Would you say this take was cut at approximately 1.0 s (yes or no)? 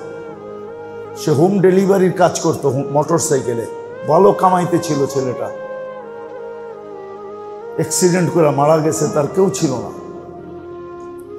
no